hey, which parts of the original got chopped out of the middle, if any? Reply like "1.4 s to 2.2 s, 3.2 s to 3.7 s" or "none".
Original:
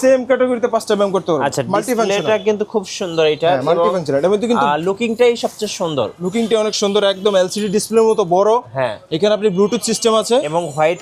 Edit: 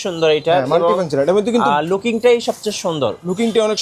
none